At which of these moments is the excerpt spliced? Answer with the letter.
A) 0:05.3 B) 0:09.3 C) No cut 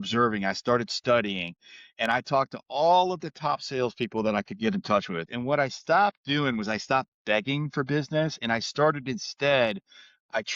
A